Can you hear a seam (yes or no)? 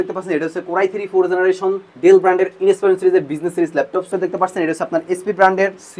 yes